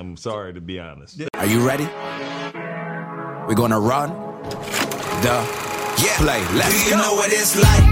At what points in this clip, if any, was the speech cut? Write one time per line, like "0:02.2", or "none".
0:01.3